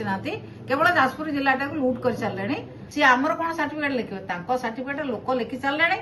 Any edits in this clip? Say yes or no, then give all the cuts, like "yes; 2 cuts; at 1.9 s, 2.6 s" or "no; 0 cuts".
yes; 1 cut; at 2.8 s